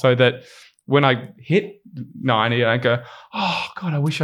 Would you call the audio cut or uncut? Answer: uncut